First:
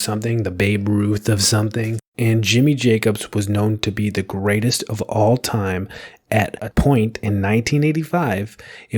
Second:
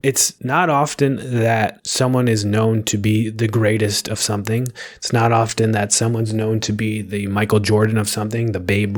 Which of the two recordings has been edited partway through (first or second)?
first